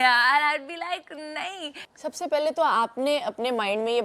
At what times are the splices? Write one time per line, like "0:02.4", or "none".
0:01.9